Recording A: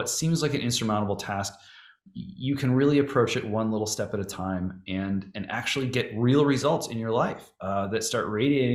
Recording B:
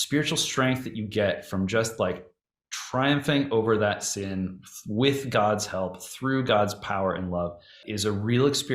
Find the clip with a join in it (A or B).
B